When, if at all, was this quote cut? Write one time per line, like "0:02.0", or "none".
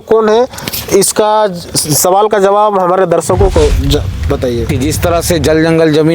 0:04.7